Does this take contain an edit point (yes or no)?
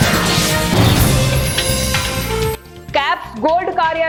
no